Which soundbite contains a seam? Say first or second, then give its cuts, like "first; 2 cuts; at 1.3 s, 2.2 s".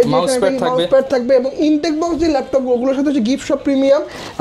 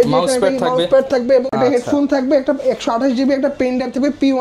second; 1 cut; at 1.5 s